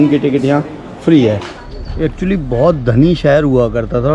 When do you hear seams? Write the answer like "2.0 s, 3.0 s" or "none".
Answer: 1.5 s